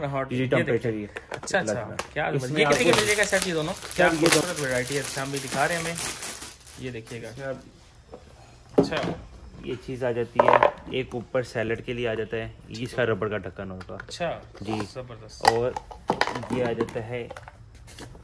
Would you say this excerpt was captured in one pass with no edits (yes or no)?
no